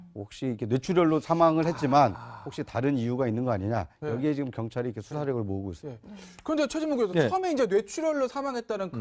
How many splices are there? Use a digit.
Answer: 1